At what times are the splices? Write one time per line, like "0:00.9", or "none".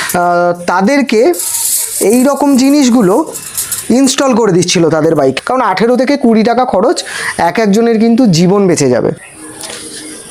0:05.4
0:09.1